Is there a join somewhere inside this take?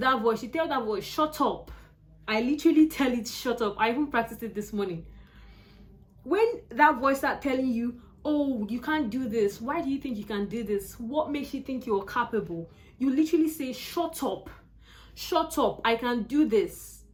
no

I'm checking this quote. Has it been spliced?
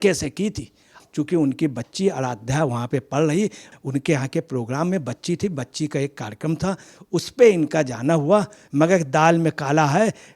yes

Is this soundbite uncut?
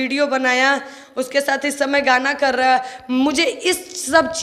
yes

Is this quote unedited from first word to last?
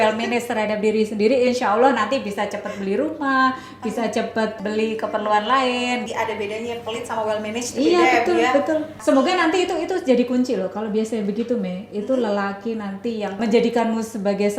no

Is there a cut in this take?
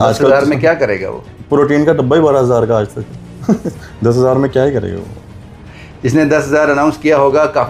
no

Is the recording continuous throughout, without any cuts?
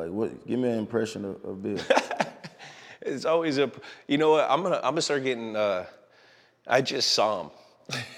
yes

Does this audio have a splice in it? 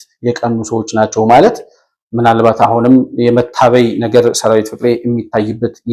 no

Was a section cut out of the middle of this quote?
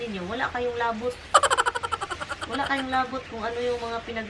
no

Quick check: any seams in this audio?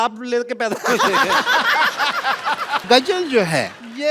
yes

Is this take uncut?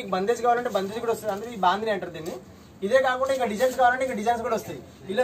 yes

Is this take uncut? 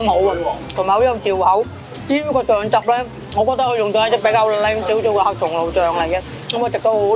yes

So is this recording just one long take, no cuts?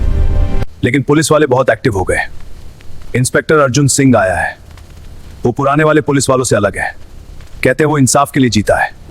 yes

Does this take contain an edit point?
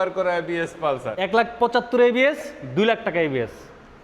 yes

